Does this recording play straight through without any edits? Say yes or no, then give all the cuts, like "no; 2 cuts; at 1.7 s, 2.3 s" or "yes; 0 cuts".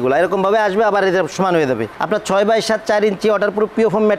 no; 1 cut; at 1.9 s